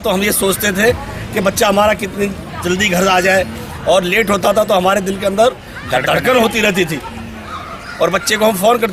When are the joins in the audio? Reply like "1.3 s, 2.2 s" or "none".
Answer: none